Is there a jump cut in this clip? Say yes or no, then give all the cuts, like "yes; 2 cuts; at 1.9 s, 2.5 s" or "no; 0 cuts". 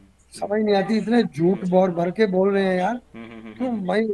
no; 0 cuts